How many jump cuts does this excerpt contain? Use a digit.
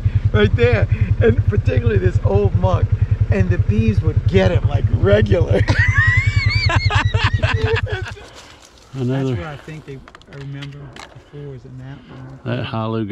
1